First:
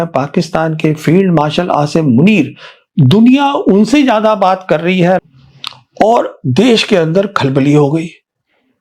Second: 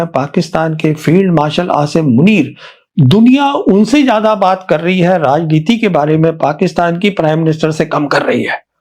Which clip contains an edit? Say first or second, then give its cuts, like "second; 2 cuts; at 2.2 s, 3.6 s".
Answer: first; 1 cut; at 5.2 s